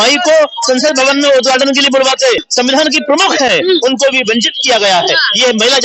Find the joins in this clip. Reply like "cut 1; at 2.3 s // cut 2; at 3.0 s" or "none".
cut 1; at 2.5 s